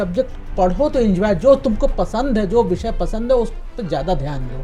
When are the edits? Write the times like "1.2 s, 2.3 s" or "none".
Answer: none